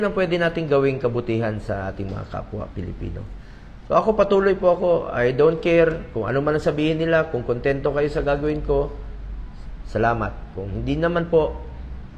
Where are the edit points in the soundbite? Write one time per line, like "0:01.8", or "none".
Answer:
none